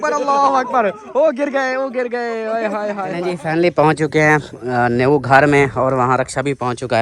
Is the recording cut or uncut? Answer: cut